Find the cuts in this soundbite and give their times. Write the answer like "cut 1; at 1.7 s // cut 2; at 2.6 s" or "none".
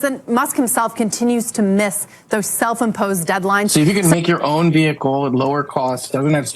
cut 1; at 3.7 s